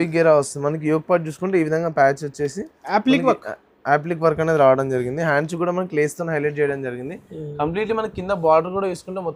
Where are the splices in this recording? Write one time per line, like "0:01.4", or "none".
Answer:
none